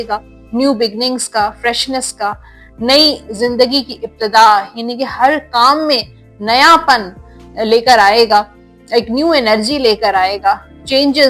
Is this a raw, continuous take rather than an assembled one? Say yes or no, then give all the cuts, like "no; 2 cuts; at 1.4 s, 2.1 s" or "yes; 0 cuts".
yes; 0 cuts